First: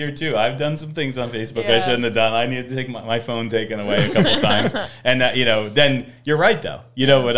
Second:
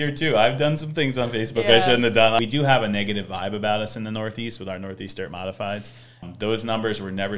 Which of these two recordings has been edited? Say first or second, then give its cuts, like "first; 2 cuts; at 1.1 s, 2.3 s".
second; 2 cuts; at 2.4 s, 6.2 s